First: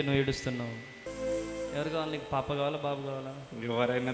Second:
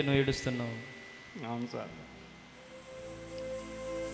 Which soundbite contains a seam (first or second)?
first